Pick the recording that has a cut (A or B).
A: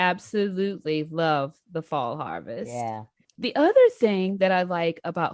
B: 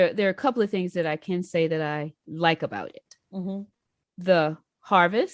A